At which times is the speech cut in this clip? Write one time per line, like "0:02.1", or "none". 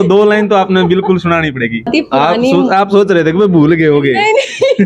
0:01.9